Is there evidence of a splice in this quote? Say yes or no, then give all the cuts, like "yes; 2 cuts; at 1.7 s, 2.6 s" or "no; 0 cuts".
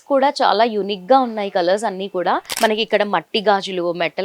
yes; 1 cut; at 2.5 s